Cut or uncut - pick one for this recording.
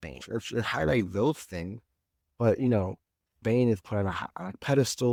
uncut